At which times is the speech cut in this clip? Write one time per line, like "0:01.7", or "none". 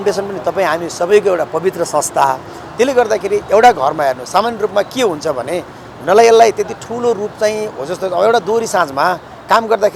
none